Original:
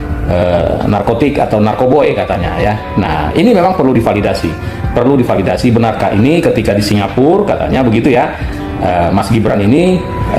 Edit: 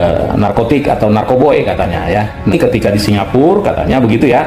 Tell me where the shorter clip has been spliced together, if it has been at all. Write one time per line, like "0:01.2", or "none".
0:02.5